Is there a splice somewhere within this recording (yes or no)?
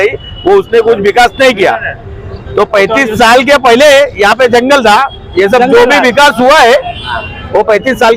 no